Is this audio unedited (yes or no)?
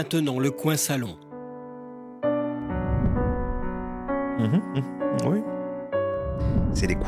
yes